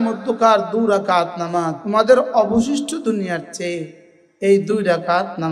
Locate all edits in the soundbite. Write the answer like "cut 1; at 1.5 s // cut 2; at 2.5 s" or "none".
cut 1; at 1.8 s